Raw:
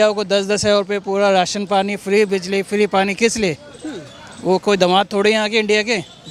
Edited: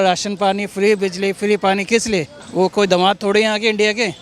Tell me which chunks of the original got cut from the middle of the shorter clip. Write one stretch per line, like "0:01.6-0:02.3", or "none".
0:03.7-0:04.3